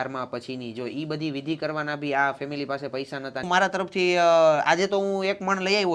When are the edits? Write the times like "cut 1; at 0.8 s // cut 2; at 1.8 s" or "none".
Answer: cut 1; at 3.4 s